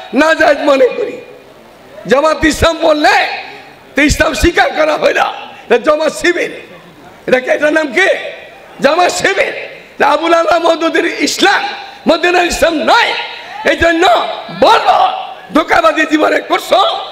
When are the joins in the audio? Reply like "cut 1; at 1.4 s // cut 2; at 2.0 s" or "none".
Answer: none